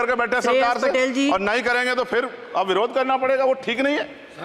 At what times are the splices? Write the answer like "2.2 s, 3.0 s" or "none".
none